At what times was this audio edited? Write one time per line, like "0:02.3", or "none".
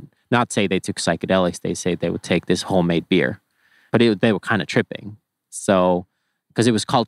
0:03.8